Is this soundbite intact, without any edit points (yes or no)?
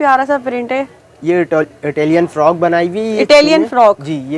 yes